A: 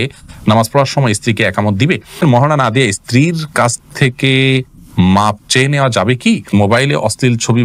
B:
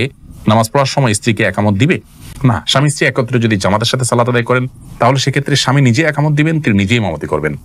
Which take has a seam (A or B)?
A